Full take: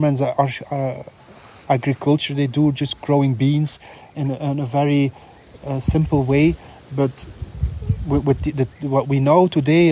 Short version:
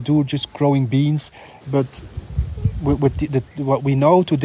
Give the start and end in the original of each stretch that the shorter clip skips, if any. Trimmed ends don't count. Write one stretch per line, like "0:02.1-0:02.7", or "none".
0:04.0-0:06.7